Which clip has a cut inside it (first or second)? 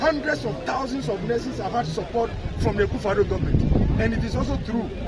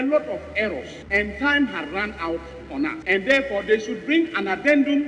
second